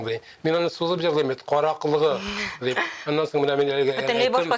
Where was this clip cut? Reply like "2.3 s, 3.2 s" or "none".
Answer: none